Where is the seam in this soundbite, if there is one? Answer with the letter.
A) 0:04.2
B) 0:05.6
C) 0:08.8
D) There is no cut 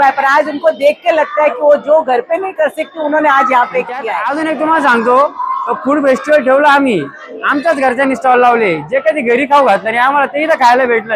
A